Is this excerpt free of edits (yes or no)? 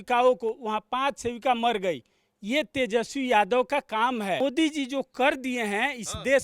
no